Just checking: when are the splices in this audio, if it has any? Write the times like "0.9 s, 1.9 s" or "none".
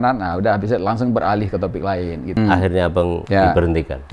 2.4 s, 3.2 s